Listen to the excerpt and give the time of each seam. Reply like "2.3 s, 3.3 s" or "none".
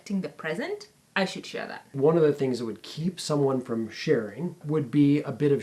1.0 s, 2.0 s